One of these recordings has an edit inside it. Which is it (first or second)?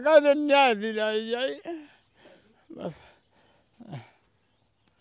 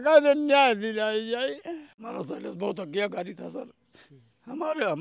second